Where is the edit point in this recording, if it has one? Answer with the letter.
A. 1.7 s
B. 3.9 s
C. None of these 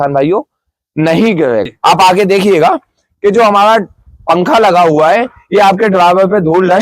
A